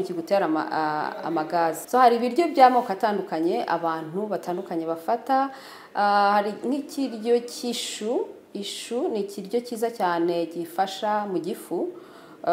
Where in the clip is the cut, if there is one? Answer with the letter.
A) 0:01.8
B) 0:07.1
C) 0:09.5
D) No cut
A